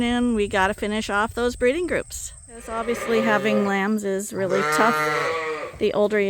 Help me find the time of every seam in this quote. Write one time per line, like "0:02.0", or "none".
0:02.7